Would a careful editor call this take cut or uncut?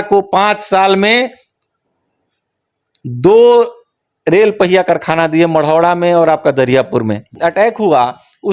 cut